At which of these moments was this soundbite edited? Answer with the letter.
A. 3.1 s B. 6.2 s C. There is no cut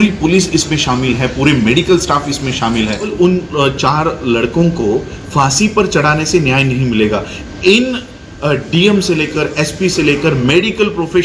A